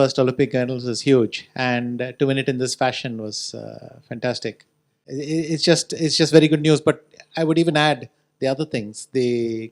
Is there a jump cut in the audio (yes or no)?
no